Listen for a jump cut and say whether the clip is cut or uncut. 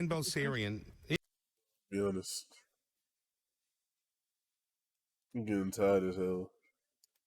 uncut